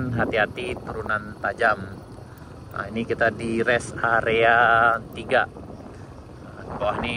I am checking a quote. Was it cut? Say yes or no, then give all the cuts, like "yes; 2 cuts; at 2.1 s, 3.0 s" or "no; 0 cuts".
no; 0 cuts